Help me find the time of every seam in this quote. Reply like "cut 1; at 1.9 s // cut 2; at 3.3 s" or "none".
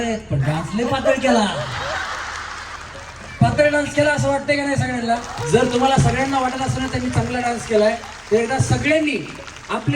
cut 1; at 5.3 s